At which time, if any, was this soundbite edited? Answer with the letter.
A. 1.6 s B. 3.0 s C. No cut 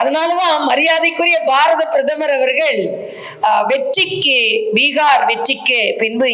C